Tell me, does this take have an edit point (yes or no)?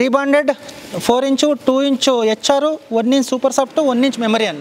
no